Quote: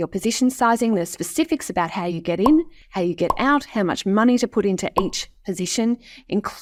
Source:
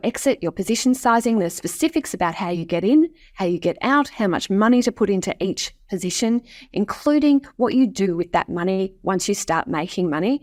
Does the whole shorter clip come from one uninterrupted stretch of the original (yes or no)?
yes